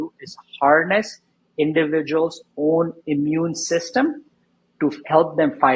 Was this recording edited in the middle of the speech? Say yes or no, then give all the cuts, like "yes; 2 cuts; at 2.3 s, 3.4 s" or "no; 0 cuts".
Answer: no; 0 cuts